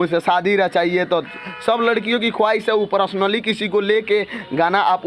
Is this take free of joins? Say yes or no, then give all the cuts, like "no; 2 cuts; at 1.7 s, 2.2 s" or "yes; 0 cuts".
yes; 0 cuts